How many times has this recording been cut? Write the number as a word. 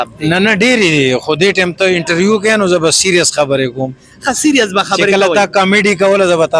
zero